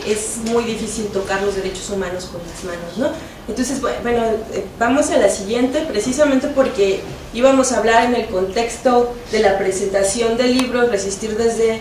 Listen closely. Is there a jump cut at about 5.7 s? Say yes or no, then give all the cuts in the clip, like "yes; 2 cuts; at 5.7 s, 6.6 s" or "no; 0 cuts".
yes; 1 cut; at 5.7 s